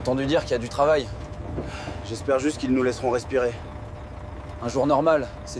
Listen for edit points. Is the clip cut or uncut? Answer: uncut